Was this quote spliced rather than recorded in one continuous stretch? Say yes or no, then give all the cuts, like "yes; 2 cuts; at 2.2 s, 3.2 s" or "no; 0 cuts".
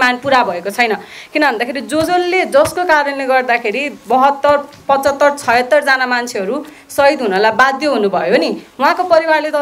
no; 0 cuts